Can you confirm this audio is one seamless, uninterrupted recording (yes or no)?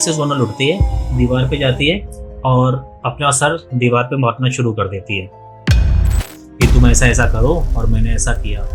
no